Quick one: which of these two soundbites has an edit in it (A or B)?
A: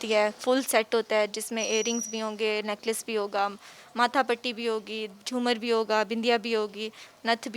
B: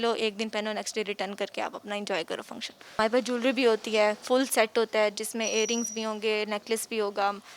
B